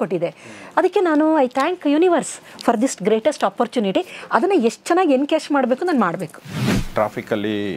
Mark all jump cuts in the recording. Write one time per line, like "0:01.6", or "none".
0:06.8